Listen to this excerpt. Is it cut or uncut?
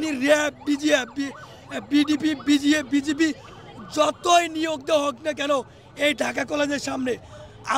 uncut